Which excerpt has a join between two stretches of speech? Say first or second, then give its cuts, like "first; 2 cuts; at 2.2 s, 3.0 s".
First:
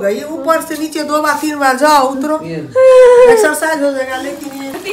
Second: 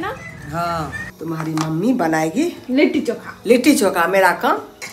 second; 2 cuts; at 1.1 s, 2.6 s